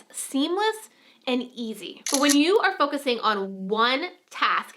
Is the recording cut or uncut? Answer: cut